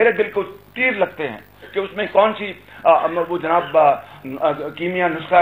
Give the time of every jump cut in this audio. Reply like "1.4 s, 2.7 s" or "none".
none